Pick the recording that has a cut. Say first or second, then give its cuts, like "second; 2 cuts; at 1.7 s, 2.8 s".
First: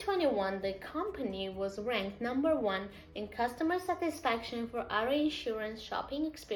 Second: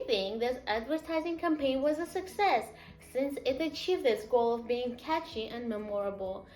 second; 1 cut; at 2.9 s